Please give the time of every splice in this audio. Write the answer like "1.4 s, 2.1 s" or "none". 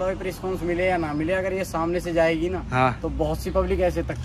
none